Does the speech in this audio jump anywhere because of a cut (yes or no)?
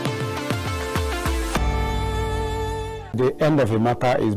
yes